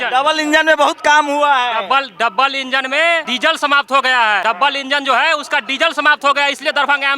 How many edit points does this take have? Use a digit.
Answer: 2